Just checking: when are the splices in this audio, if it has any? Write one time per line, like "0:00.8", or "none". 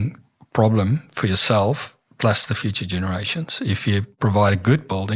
0:04.1